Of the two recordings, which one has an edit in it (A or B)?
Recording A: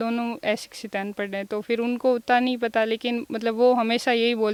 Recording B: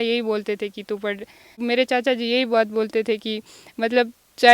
B